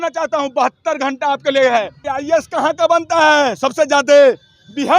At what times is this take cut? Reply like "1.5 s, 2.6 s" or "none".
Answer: 2.1 s